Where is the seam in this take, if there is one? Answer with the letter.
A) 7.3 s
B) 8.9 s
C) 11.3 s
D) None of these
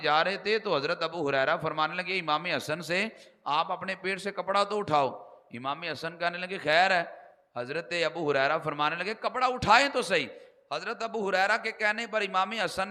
D